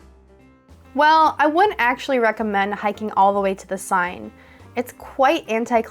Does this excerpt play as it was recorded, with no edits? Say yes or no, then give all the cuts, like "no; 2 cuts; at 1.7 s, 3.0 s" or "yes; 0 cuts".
no; 1 cut; at 0.9 s